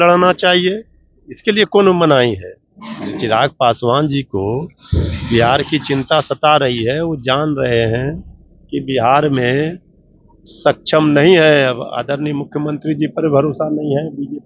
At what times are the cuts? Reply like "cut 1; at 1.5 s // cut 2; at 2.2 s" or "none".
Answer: none